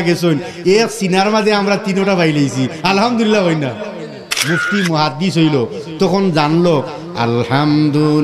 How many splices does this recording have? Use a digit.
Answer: 1